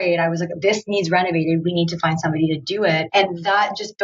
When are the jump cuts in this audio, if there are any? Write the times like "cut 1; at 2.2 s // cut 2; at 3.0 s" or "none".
cut 1; at 3.1 s